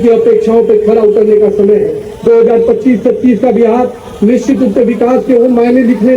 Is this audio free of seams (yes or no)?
yes